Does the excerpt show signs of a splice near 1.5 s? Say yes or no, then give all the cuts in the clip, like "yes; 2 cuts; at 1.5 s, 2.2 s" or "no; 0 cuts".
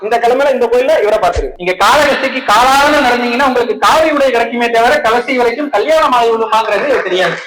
yes; 1 cut; at 1.5 s